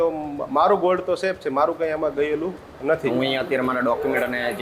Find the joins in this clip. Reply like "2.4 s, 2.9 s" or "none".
3.1 s